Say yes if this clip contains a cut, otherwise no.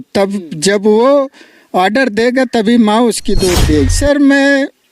yes